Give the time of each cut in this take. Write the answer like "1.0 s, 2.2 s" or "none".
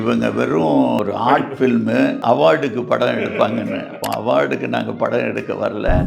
1.0 s, 2.2 s, 3.9 s